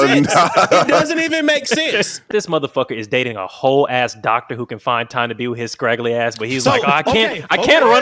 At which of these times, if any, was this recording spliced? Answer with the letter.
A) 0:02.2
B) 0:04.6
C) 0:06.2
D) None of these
A